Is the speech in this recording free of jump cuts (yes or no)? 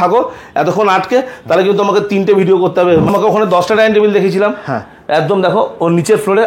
no